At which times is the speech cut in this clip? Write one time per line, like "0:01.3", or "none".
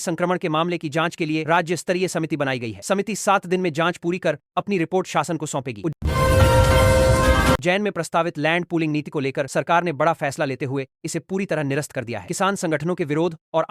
0:06.0
0:07.6